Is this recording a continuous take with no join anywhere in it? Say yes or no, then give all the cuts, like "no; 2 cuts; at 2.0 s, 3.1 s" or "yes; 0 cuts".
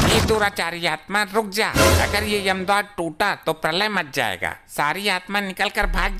yes; 0 cuts